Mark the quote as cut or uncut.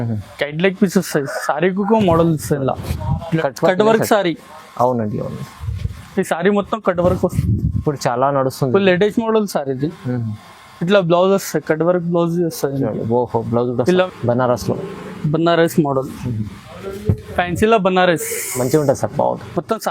cut